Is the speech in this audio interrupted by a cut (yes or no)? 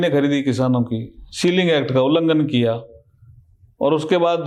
no